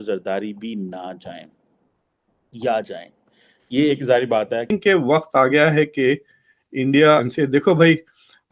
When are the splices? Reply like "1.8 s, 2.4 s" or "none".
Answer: 4.7 s